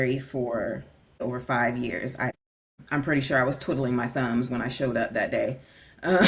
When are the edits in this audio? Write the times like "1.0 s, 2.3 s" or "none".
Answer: 1.2 s, 2.3 s